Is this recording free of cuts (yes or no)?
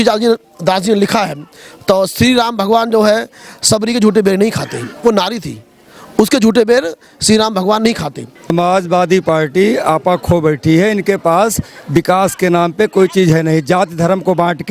no